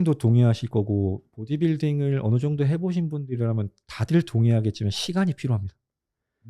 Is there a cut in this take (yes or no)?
no